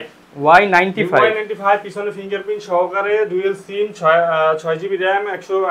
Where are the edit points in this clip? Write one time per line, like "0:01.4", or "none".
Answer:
none